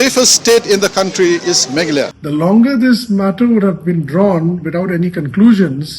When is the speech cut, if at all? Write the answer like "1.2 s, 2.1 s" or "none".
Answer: 2.1 s